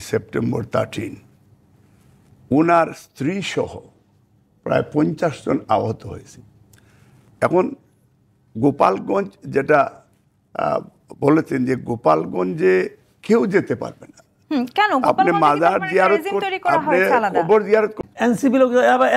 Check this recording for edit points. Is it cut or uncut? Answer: cut